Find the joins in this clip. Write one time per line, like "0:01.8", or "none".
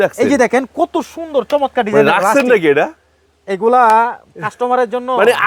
none